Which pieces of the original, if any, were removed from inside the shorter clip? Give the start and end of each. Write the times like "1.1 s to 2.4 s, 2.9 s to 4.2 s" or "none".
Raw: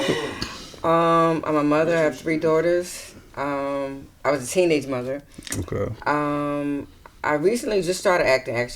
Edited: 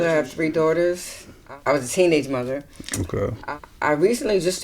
3.3 s to 4.0 s, 6.0 s to 6.8 s